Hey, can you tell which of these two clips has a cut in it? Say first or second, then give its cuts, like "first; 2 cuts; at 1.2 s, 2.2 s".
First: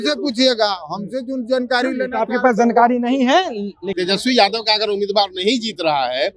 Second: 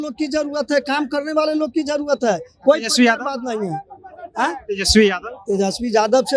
first; 1 cut; at 3.8 s